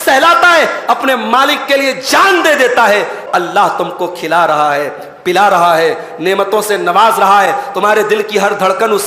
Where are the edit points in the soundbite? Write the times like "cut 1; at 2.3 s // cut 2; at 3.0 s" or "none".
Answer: cut 1; at 3.2 s